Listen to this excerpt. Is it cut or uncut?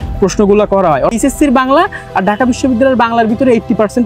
cut